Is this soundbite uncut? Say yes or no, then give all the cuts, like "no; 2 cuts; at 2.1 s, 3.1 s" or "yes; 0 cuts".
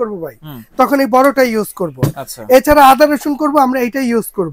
yes; 0 cuts